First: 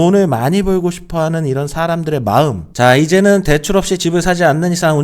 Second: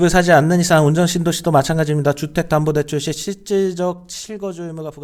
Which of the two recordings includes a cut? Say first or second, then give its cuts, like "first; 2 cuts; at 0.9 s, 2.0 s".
first; 1 cut; at 2.6 s